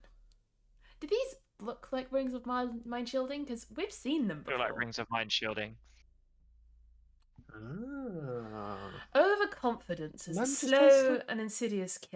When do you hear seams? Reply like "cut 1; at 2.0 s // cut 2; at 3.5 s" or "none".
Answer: none